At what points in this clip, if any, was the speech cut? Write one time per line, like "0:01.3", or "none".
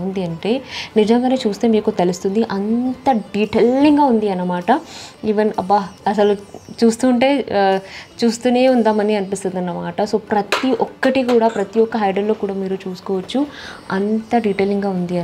none